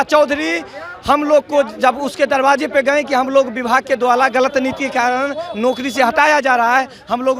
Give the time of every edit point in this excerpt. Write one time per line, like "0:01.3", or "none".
none